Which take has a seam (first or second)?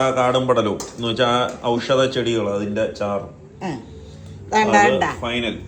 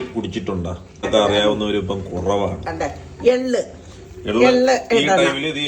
second